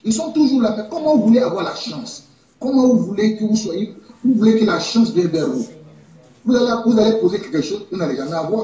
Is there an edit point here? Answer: no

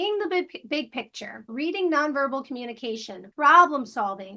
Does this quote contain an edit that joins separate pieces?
yes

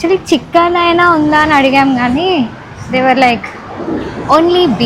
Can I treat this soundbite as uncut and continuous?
yes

